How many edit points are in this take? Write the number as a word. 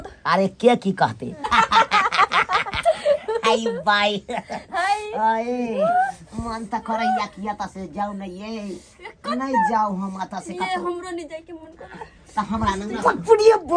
one